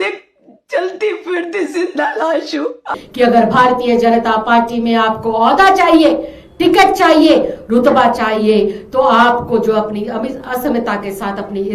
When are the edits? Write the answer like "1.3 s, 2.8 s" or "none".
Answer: 2.9 s